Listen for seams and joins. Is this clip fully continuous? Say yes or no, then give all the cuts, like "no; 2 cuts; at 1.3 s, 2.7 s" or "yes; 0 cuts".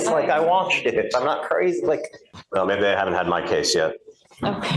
no; 1 cut; at 2.3 s